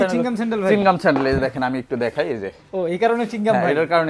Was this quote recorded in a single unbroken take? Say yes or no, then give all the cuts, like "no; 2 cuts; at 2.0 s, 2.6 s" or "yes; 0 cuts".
yes; 0 cuts